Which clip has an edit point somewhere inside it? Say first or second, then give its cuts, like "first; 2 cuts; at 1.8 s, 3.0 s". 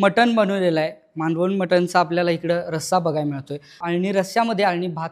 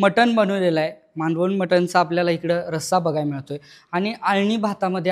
first; 1 cut; at 3.8 s